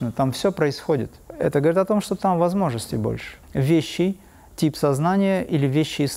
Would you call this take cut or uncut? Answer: cut